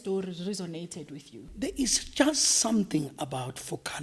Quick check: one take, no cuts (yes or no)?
no